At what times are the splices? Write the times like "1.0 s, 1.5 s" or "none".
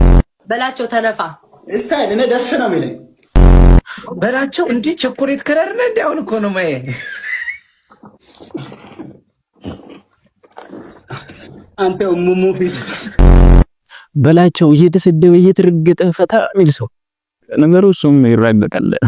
none